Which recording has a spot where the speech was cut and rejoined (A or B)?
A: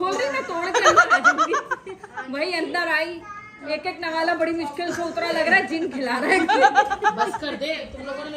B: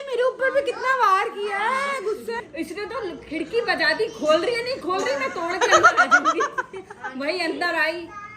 B